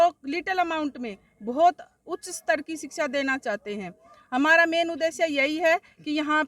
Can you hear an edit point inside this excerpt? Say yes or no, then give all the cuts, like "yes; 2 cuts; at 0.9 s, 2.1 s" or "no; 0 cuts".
no; 0 cuts